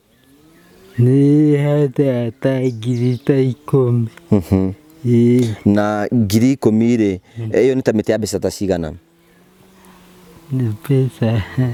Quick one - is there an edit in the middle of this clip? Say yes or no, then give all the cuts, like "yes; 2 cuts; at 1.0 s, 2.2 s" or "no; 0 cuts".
no; 0 cuts